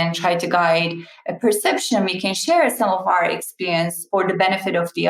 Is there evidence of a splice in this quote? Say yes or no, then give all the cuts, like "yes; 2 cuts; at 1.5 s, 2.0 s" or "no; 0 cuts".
yes; 1 cut; at 4.0 s